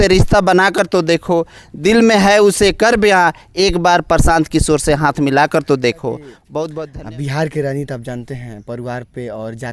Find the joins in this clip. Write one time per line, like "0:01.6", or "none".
0:06.8